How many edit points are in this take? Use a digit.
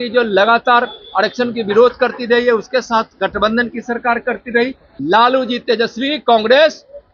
1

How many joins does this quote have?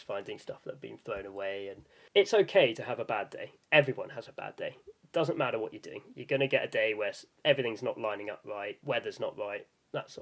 2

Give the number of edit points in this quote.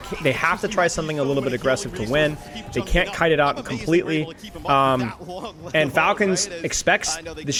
0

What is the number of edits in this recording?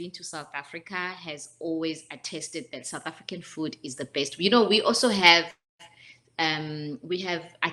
0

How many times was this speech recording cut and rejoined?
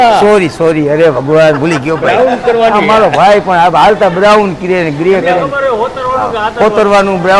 0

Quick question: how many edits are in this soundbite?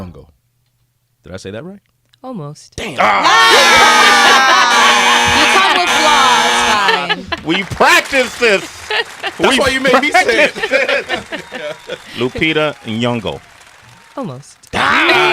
0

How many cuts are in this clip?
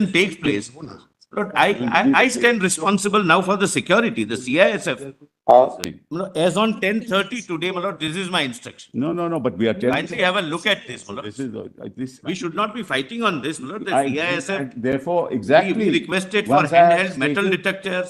1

